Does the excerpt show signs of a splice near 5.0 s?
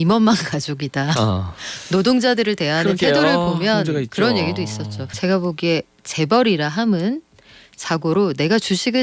yes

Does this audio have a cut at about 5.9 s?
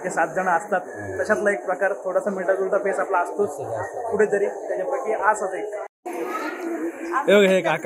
yes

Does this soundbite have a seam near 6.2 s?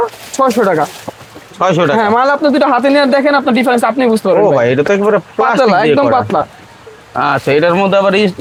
no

